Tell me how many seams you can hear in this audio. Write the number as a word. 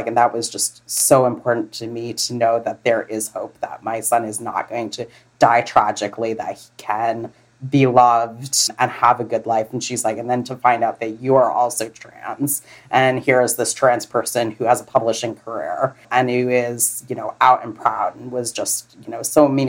two